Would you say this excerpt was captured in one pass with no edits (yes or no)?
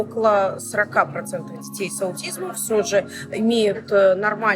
yes